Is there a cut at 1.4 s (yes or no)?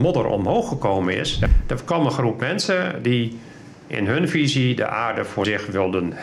yes